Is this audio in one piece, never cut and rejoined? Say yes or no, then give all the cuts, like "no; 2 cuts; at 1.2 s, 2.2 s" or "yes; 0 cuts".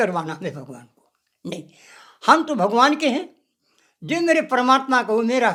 yes; 0 cuts